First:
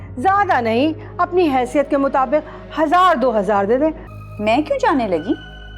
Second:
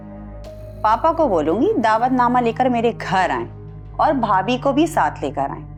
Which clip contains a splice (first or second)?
first